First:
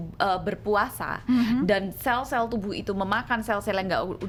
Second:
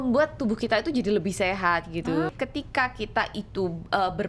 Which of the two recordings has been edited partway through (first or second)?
second